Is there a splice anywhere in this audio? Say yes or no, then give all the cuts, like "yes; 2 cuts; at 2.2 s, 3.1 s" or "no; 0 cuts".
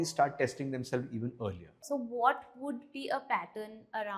yes; 1 cut; at 1.7 s